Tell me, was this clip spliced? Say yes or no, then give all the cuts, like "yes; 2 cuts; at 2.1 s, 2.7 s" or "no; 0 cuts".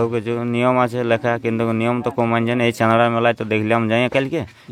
no; 0 cuts